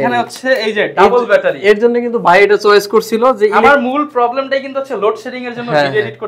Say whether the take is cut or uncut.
uncut